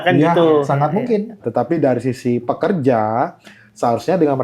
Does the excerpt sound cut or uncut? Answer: cut